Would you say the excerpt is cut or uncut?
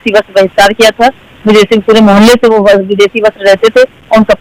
uncut